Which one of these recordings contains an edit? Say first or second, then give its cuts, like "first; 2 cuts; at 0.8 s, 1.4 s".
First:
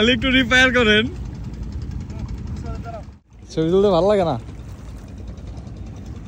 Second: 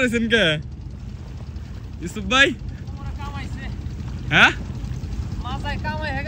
first; 1 cut; at 3.1 s